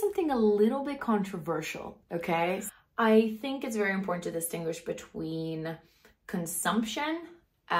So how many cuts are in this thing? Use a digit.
1